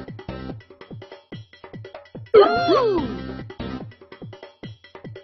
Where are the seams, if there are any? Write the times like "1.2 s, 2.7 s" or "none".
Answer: 2.3 s, 3.1 s